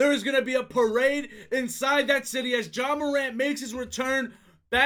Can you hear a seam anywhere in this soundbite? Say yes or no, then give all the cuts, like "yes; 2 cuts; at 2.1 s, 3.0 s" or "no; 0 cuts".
no; 0 cuts